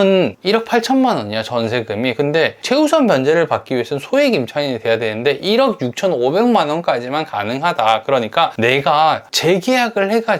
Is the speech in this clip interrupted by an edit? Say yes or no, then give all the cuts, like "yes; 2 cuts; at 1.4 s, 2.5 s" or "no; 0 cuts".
yes; 2 cuts; at 2.6 s, 8.5 s